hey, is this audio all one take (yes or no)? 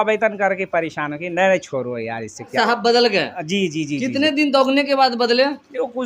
no